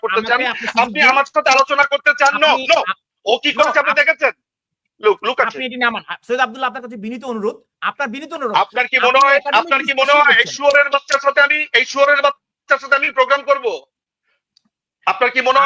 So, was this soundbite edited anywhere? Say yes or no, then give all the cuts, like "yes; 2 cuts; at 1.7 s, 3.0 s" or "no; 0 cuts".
no; 0 cuts